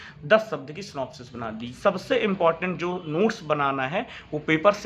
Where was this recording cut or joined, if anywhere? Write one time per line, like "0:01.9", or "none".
0:01.7